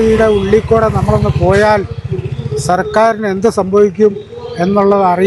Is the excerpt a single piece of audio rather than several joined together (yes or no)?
yes